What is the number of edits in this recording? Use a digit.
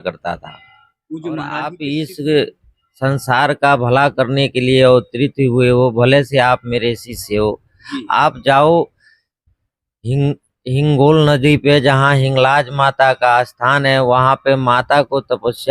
1